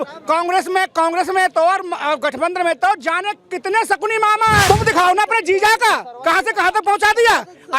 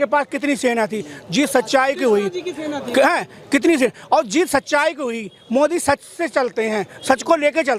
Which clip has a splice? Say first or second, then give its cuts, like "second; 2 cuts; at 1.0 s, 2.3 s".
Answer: first; 1 cut; at 4.7 s